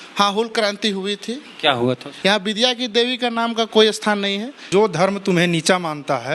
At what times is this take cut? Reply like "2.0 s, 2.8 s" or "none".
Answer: 2.1 s, 4.6 s